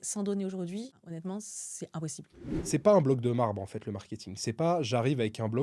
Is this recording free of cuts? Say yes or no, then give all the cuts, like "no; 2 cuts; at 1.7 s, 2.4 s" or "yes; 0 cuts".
no; 2 cuts; at 1.0 s, 2.6 s